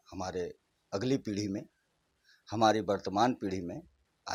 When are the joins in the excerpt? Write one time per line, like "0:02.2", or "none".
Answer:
none